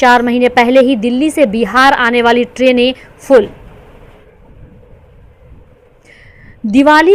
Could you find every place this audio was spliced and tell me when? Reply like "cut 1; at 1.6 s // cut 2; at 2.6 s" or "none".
none

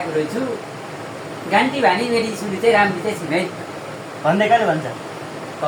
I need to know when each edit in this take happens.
none

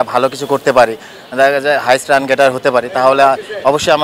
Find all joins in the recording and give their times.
none

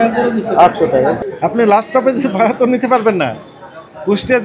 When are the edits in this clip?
cut 1; at 1.2 s

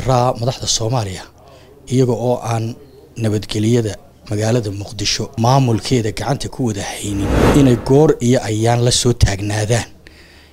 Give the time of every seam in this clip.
cut 1; at 5.3 s // cut 2; at 7.4 s

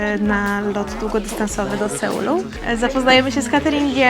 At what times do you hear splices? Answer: cut 1; at 2.5 s

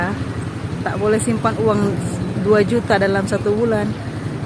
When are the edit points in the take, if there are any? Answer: none

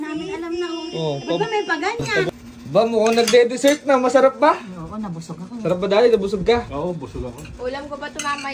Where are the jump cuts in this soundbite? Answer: cut 1; at 2.3 s

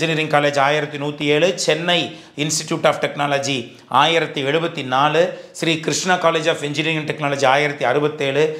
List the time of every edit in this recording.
none

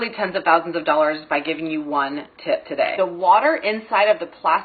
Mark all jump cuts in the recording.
cut 1; at 2.9 s

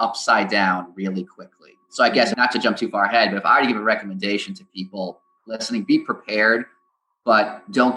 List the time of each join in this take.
cut 1; at 2.3 s

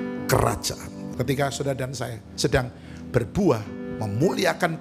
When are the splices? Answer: cut 1; at 1.0 s

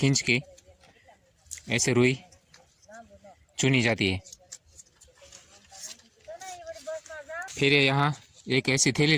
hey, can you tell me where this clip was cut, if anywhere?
none

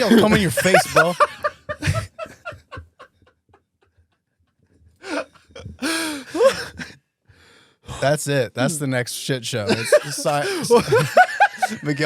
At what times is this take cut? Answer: none

